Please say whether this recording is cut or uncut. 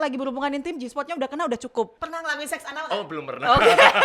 cut